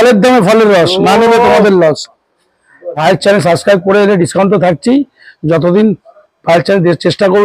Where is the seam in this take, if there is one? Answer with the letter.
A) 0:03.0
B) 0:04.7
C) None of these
A